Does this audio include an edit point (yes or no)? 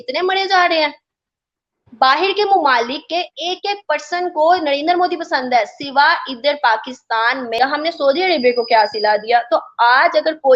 yes